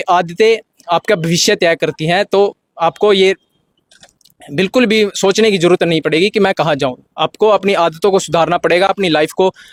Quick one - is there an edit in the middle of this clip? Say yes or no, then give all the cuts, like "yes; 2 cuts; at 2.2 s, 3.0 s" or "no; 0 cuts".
no; 0 cuts